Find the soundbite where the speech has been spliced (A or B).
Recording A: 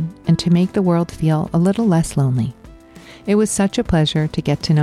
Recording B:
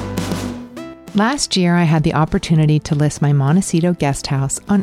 B